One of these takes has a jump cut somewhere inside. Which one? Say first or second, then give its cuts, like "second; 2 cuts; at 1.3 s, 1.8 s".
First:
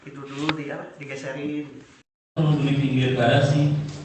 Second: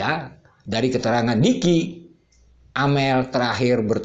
first; 1 cut; at 2.4 s